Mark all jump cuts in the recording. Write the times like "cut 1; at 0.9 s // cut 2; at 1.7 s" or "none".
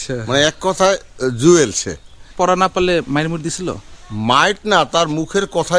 cut 1; at 2.2 s